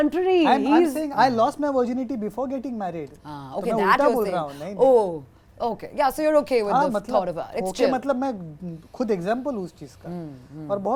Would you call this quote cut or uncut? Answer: uncut